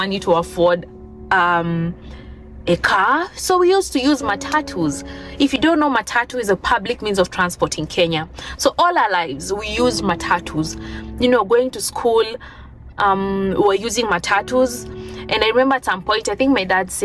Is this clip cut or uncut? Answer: uncut